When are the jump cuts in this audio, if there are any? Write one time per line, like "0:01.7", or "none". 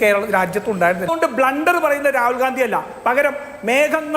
0:01.1